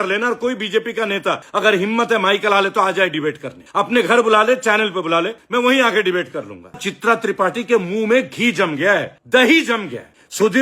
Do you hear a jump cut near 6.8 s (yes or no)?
yes